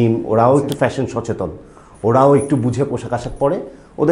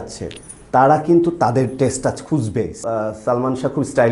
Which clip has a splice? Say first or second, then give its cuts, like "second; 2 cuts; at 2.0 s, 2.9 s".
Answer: second; 1 cut; at 2.9 s